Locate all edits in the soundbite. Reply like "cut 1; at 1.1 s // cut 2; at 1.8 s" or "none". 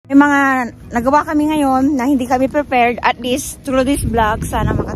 none